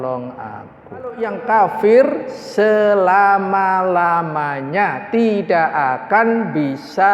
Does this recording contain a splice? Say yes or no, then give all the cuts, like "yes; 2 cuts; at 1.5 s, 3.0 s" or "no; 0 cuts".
yes; 1 cut; at 1.2 s